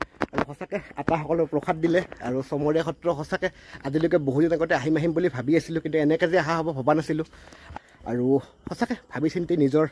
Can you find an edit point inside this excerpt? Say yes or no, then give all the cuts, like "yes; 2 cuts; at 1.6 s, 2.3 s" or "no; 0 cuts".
yes; 1 cut; at 7.7 s